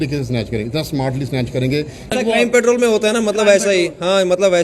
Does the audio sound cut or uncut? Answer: cut